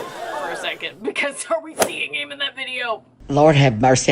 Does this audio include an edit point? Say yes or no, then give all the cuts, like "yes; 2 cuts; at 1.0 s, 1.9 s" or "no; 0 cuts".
yes; 1 cut; at 3.1 s